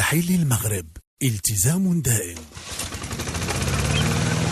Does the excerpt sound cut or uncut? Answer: cut